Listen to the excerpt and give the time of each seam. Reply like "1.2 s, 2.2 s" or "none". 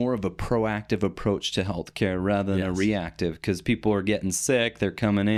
none